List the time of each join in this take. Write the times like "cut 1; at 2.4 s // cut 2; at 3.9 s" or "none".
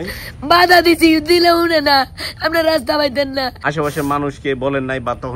cut 1; at 3.6 s